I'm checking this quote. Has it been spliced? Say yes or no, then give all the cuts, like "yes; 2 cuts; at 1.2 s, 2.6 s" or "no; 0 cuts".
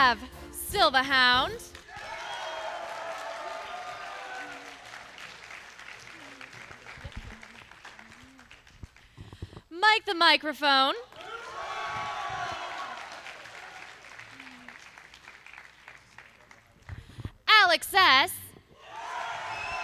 no; 0 cuts